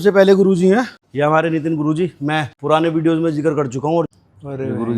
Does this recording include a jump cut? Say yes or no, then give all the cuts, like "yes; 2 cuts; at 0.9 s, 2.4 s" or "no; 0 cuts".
yes; 3 cuts; at 1.0 s, 2.5 s, 4.1 s